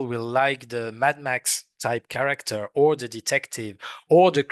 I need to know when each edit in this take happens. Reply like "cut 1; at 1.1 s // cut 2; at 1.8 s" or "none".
none